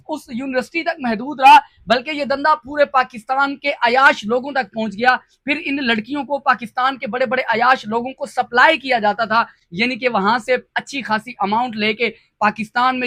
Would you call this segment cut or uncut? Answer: uncut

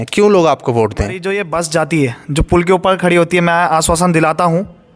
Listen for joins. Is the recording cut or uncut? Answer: cut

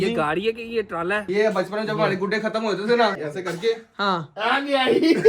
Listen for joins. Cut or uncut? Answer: cut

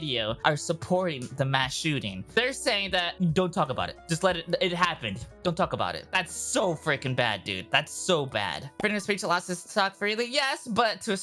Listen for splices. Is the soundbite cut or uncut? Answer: uncut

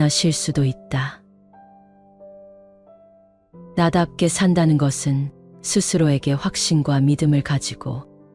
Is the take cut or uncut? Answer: uncut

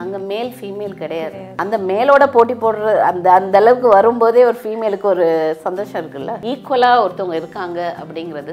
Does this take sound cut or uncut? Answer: cut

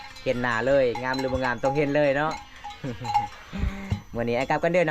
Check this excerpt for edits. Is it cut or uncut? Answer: uncut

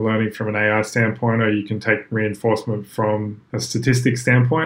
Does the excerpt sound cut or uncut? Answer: cut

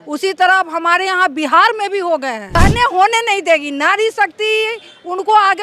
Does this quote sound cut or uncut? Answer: cut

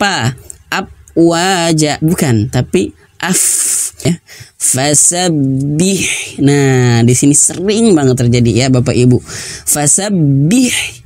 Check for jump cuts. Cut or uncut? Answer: cut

